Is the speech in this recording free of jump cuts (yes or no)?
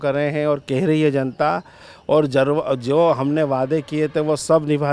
yes